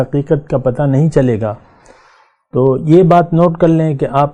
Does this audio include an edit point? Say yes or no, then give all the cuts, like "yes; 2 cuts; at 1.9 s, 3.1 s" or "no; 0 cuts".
no; 0 cuts